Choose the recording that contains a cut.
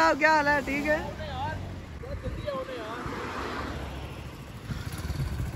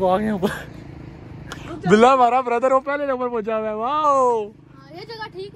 first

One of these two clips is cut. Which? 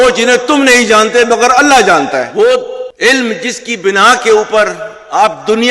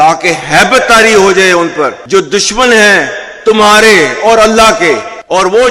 first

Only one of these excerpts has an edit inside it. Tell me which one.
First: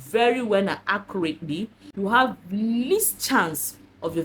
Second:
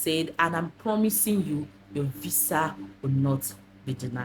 first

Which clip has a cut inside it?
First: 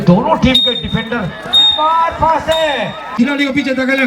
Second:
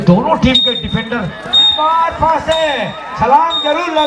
first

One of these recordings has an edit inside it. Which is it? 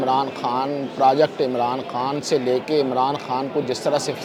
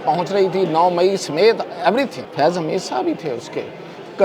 second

